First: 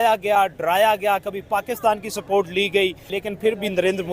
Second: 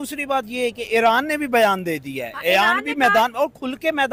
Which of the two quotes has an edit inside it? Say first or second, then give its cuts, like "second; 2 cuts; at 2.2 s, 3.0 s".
first; 1 cut; at 3.1 s